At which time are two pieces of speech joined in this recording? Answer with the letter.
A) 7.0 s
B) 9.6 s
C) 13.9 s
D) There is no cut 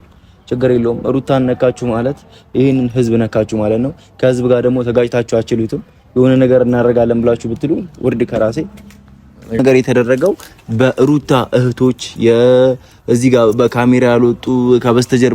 B